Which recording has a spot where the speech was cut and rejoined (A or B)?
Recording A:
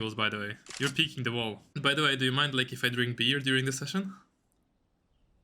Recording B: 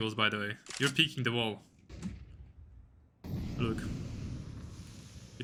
A